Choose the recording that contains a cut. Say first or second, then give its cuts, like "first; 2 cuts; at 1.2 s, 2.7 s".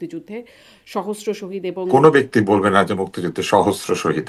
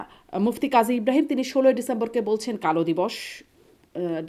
first; 1 cut; at 1.9 s